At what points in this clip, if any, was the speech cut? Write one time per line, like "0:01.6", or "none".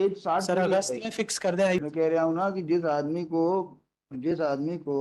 0:01.8